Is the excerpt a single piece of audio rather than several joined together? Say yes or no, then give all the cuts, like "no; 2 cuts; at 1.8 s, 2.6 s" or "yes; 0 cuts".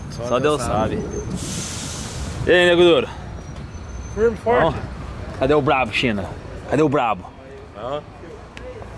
yes; 0 cuts